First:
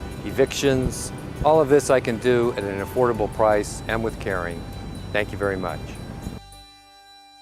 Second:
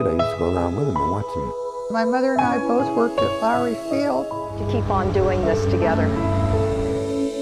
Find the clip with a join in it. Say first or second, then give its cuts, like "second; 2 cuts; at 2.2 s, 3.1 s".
first; 1 cut; at 6.4 s